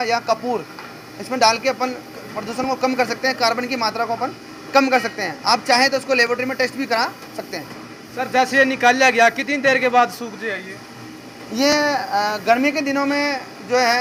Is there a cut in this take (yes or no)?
no